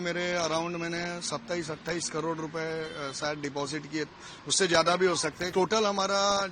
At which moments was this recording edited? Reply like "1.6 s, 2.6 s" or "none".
5.5 s